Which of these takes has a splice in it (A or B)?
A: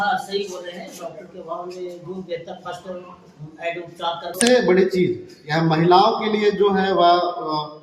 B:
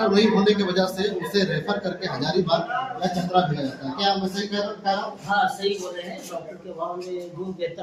A